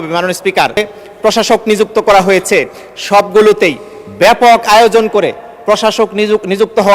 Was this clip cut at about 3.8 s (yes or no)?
no